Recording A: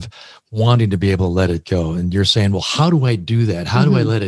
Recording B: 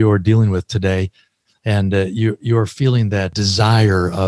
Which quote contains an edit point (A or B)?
B